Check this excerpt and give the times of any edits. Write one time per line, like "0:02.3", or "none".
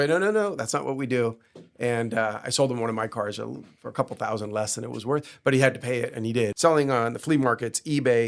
0:06.5